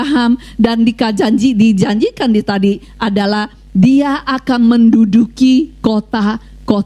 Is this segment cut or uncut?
uncut